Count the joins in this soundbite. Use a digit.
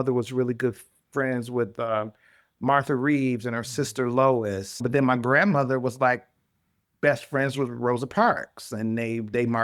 1